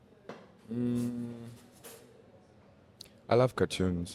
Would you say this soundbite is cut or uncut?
uncut